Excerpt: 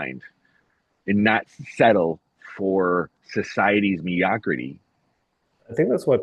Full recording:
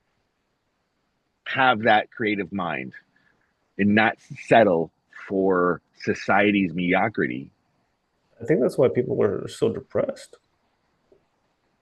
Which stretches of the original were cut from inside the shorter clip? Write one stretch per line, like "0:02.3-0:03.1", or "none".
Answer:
none